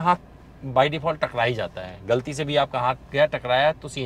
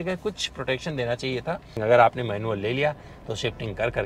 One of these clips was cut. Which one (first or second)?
second